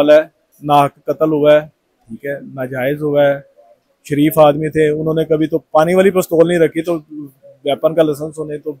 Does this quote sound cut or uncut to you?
uncut